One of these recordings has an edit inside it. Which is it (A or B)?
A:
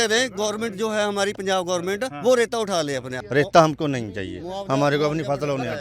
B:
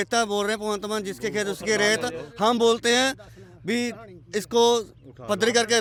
A